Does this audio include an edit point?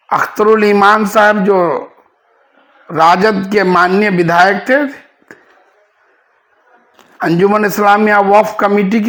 no; 0 cuts

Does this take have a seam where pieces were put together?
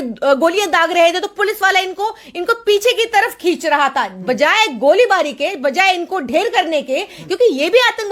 yes; 1 cut; at 4.1 s

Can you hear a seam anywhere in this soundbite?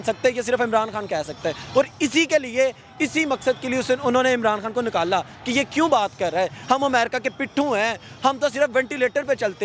no; 0 cuts

